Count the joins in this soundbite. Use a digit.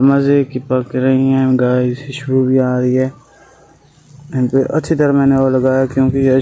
1